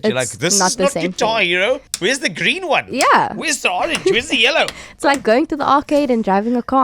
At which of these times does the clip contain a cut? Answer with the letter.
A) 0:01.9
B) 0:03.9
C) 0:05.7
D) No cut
A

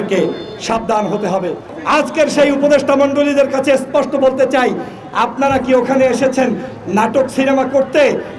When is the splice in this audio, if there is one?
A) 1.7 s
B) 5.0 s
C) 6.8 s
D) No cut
A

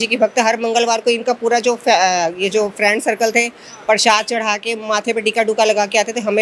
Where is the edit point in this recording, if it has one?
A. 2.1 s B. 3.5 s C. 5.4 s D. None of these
D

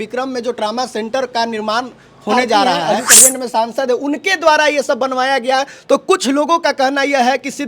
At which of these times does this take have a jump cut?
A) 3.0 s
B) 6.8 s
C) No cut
A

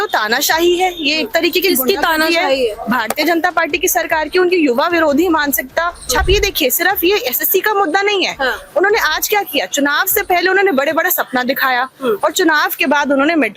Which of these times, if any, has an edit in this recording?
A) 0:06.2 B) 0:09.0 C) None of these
A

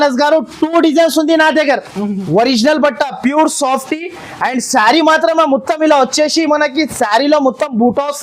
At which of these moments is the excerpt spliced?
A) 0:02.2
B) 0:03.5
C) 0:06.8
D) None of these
A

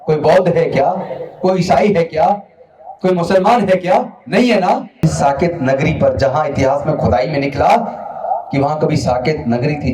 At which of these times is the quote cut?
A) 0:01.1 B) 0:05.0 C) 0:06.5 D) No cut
B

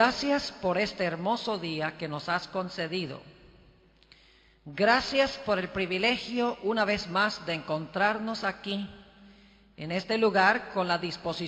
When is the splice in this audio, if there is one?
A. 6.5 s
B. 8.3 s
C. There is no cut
B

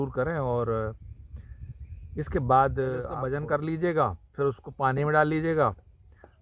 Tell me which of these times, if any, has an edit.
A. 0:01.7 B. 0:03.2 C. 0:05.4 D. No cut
B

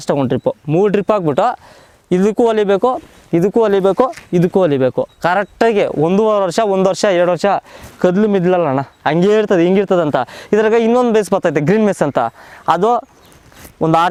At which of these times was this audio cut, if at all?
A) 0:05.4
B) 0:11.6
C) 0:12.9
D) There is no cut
D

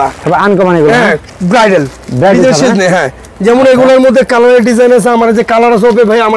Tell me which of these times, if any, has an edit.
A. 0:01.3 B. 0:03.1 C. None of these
A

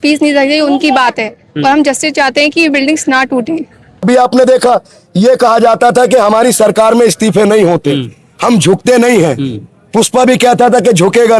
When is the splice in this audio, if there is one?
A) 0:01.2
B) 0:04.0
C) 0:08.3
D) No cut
B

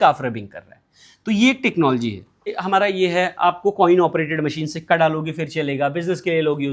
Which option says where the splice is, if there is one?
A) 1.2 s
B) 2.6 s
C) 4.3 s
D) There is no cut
B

